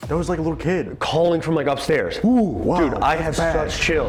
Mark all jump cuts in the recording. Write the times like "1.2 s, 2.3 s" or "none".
none

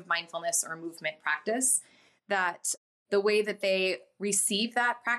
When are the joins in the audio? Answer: 2.8 s

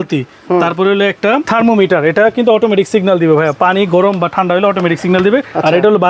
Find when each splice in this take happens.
none

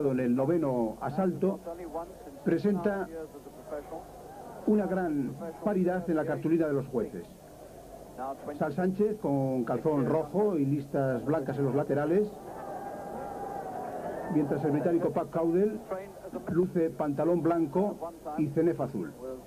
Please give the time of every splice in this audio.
10.0 s

